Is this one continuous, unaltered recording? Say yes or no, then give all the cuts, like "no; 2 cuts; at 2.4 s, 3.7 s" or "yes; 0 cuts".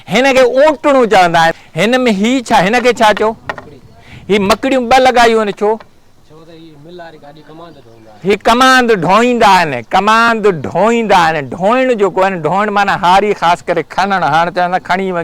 no; 1 cut; at 1.5 s